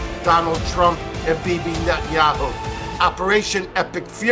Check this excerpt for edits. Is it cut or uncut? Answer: cut